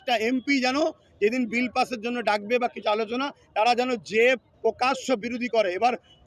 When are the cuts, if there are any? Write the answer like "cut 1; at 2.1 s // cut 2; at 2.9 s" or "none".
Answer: none